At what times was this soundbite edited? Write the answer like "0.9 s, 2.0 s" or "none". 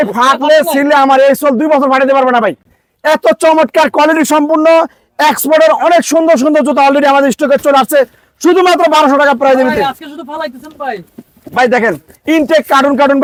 none